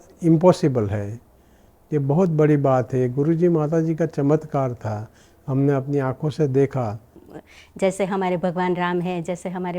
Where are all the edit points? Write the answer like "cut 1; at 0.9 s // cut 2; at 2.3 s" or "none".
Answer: none